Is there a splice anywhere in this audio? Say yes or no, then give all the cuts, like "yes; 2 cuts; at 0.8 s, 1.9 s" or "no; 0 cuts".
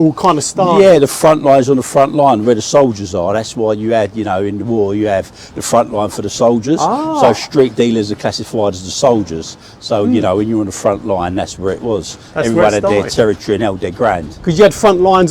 no; 0 cuts